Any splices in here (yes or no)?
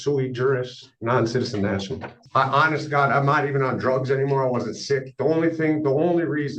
yes